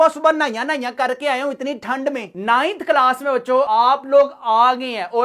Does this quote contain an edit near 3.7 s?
yes; 2 cuts; at 2.3 s, 3.7 s

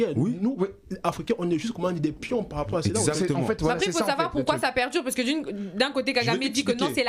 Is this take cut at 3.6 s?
no; 0 cuts

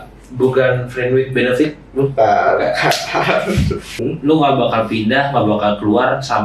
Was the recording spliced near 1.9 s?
no; 1 cut; at 3.9 s

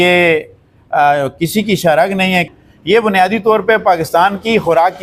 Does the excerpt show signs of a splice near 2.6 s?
no; 0 cuts

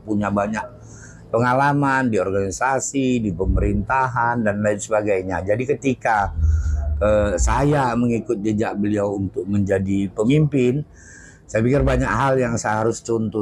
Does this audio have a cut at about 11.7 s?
no; 0 cuts

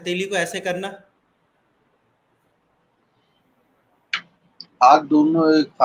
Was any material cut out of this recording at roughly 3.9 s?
no; 0 cuts

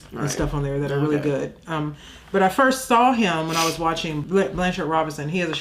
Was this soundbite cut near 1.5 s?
no; 1 cut; at 4.2 s

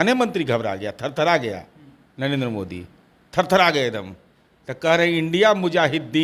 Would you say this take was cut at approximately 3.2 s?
no; 0 cuts

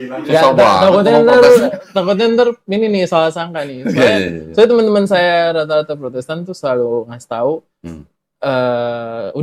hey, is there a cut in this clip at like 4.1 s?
yes; 1 cut; at 4.1 s

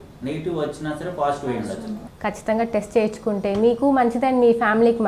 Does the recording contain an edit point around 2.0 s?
yes; 1 cut; at 2.0 s

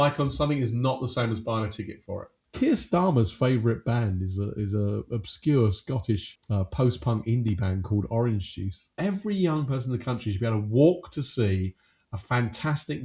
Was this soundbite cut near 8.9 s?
yes; 3 cuts; at 2.3 s, 6.4 s, 8.9 s

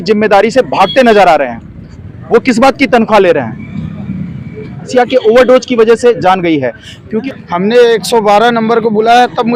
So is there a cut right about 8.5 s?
no; 2 cuts; at 4.8 s, 7.2 s

